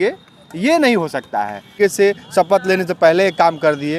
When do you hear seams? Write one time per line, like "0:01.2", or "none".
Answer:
0:01.7